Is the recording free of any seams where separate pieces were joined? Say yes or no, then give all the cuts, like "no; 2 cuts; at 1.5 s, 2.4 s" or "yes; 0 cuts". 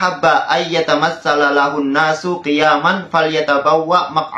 yes; 0 cuts